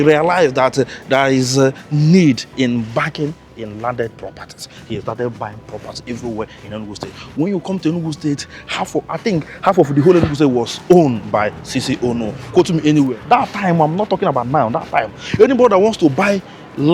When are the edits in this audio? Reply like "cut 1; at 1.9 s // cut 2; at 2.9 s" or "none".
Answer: cut 1; at 13.2 s